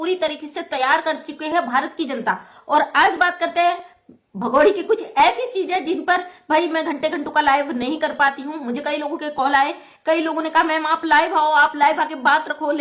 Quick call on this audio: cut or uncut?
uncut